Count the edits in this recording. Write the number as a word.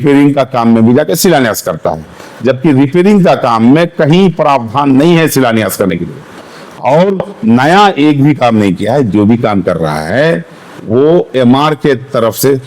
zero